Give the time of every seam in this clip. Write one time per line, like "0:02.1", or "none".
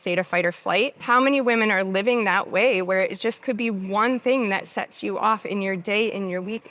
0:01.0